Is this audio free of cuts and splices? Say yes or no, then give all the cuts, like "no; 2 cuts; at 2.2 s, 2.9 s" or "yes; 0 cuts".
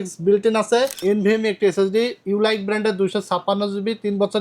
no; 1 cut; at 1.0 s